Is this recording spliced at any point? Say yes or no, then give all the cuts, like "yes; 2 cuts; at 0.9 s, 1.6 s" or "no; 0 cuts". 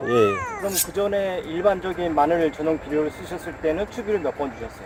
no; 0 cuts